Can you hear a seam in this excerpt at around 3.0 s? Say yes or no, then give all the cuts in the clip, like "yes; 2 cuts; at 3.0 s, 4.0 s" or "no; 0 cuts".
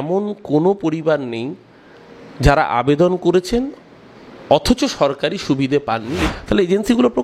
no; 1 cut; at 6.2 s